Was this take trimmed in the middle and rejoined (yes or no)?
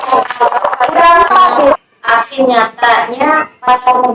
yes